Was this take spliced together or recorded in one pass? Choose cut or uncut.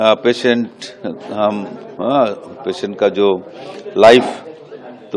uncut